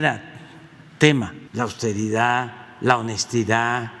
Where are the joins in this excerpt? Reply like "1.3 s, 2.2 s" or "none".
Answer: 1.4 s